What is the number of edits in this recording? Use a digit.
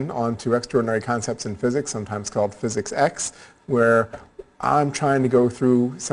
1